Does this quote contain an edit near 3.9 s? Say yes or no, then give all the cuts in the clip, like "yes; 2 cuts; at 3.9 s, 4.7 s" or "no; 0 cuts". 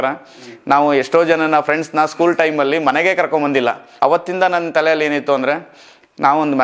yes; 1 cut; at 3.9 s